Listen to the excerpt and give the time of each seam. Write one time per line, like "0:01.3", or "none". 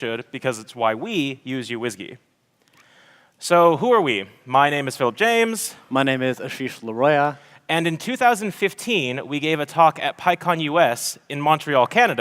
0:05.3

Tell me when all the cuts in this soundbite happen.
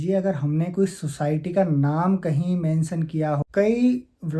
0:03.4

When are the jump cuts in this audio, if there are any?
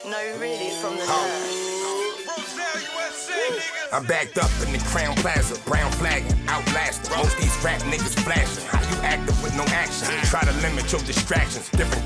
none

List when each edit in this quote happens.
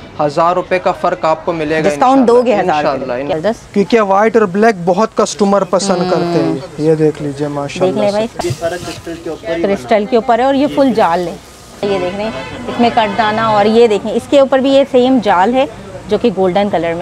0:03.3
0:08.3
0:11.8

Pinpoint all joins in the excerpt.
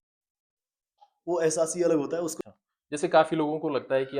0:02.3

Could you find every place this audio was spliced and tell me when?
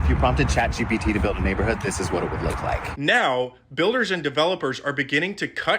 0:02.9

